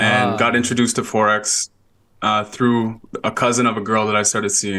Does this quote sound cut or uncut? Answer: uncut